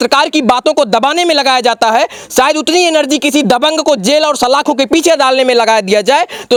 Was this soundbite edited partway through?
no; 0 cuts

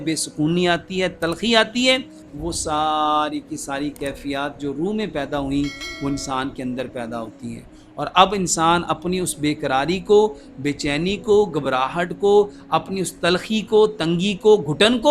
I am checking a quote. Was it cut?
no; 0 cuts

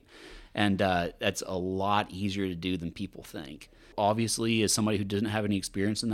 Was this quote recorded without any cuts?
no; 1 cut; at 3.9 s

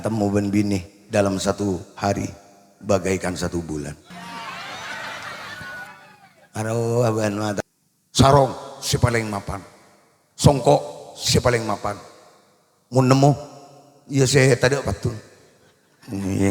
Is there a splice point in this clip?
yes; 1 cut; at 7.6 s

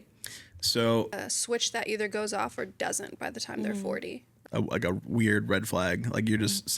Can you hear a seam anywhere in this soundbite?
yes; 2 cuts; at 1.2 s, 4.3 s

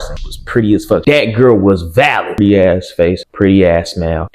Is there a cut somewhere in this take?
yes; 1 cut; at 2.4 s

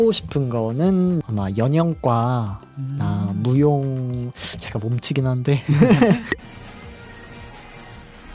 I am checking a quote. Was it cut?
no; 0 cuts

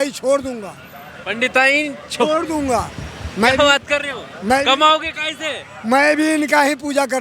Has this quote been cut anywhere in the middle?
no; 0 cuts

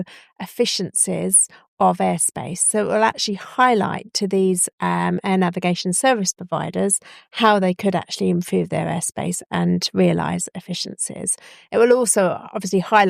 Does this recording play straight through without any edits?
yes; 0 cuts

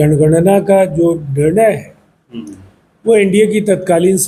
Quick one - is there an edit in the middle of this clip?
no; 0 cuts

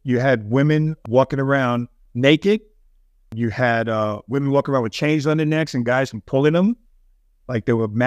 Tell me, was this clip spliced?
yes; 3 cuts; at 1.0 s, 2.0 s, 3.3 s

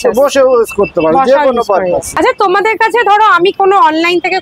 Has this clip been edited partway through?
no; 0 cuts

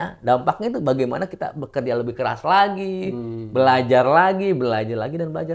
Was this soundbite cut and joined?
no; 0 cuts

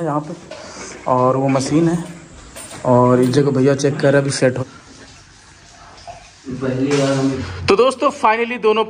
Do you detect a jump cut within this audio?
yes; 2 cuts; at 4.6 s, 7.4 s

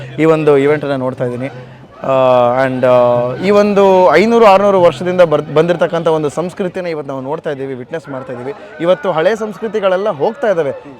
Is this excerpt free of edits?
yes; 0 cuts

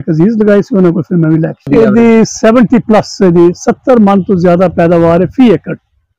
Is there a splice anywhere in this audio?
yes; 1 cut; at 1.7 s

